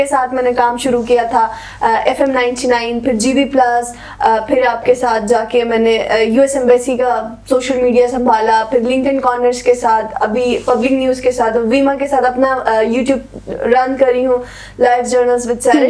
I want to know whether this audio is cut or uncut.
uncut